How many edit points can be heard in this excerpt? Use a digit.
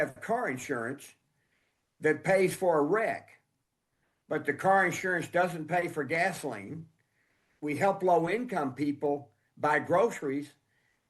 1